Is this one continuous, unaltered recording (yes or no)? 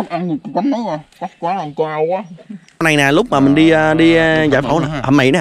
no